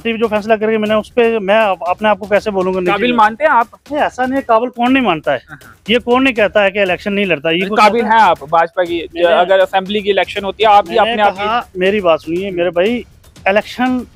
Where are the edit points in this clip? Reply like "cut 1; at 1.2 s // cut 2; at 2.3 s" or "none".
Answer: none